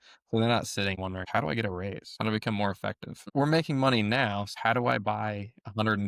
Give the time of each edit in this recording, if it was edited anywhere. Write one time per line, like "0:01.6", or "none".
0:01.0
0:02.1
0:03.2
0:04.5

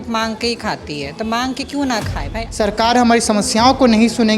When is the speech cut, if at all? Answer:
0:02.4

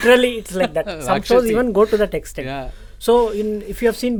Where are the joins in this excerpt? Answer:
none

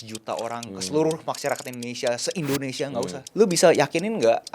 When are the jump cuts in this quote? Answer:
0:03.2

